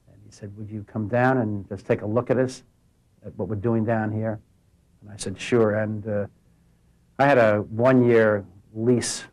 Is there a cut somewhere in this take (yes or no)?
no